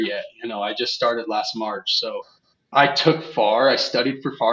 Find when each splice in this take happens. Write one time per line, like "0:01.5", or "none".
0:02.7